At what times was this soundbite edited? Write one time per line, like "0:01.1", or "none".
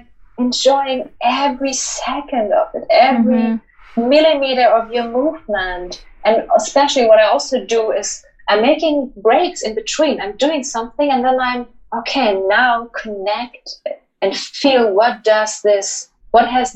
none